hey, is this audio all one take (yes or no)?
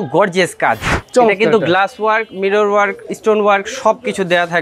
no